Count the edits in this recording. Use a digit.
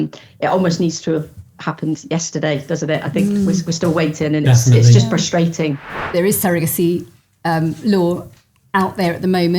1